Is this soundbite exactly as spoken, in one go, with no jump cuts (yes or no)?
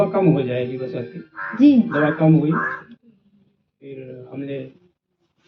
yes